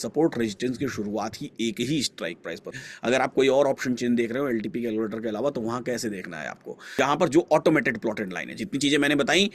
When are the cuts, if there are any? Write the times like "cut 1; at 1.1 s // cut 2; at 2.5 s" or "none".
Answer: cut 1; at 2.7 s // cut 2; at 7.0 s